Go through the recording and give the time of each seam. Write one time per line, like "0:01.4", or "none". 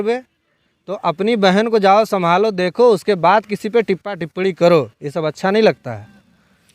none